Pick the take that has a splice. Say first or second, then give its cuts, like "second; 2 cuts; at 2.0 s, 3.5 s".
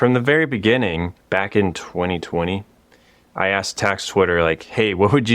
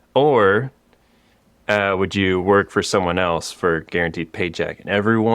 first; 1 cut; at 1.1 s